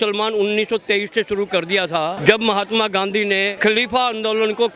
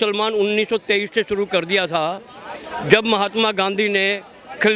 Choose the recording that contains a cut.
first; 2 cuts; at 2.2 s, 3.5 s

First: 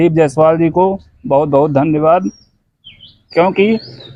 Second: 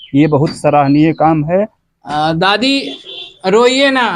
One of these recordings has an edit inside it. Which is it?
second; 1 cut; at 1.8 s

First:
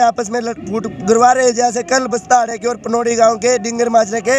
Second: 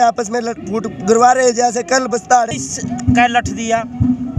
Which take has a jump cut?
second; 1 cut; at 2.6 s

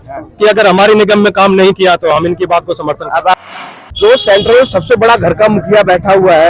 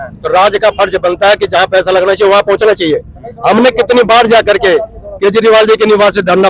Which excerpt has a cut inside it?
first; 1 cut; at 3.3 s

